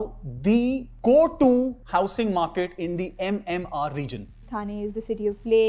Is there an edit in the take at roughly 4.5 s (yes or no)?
yes